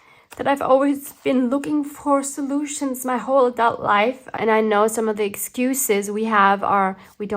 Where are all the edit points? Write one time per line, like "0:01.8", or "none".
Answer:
0:04.3